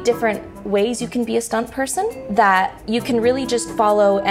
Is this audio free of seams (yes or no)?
no